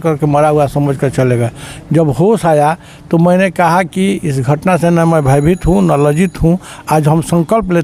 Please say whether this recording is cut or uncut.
uncut